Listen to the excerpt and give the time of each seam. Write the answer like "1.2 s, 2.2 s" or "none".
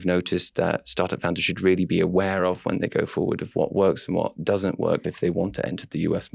5.0 s